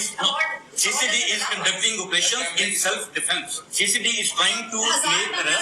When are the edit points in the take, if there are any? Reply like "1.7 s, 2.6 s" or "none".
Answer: 3.6 s